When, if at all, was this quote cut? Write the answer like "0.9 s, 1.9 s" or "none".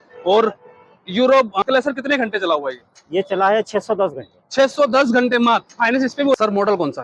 1.6 s, 6.3 s